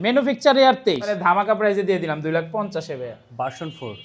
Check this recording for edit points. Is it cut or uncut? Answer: cut